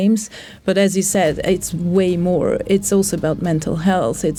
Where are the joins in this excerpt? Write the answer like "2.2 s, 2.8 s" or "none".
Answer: none